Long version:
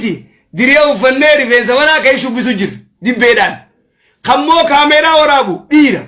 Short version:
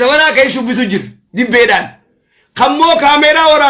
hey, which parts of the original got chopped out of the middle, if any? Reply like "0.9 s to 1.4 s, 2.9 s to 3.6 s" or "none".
none